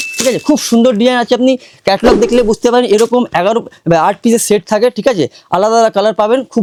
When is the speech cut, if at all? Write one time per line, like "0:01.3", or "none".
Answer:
none